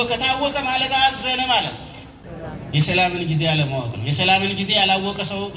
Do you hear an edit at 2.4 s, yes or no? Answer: yes